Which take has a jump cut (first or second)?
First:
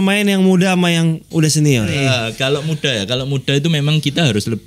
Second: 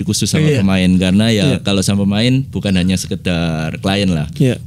first